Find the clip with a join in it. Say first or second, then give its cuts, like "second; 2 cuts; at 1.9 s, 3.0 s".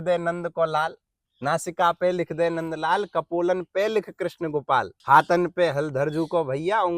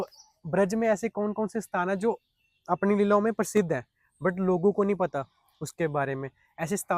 first; 1 cut; at 5.0 s